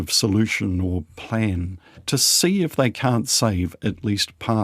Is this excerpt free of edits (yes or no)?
no